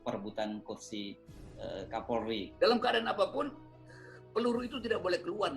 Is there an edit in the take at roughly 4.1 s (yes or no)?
no